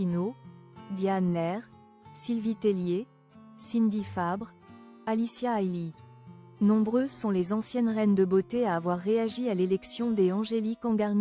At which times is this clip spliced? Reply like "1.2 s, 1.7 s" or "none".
none

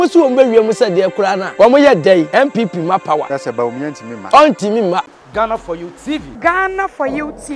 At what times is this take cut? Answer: 1.4 s, 2.3 s, 3.7 s, 5.1 s

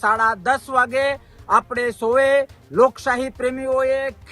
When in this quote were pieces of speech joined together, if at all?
none

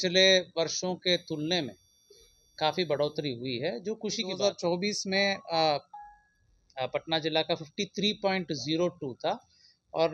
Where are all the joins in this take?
4.3 s

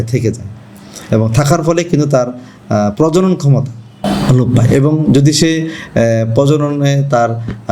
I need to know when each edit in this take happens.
3.9 s

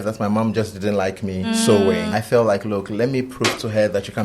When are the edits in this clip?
1.5 s, 2.1 s

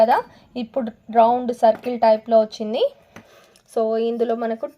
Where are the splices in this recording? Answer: 3.4 s

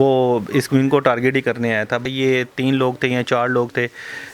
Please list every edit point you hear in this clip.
2.0 s

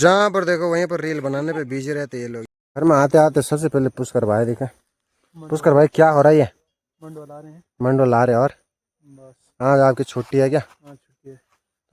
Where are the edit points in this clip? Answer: 2.5 s

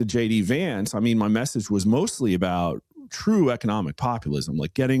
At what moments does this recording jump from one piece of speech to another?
none

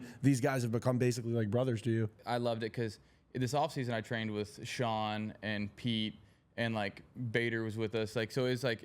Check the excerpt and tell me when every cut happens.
2.2 s

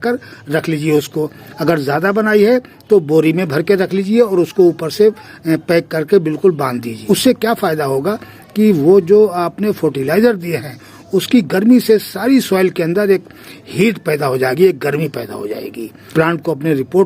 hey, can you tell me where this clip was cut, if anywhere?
6.9 s, 15.9 s

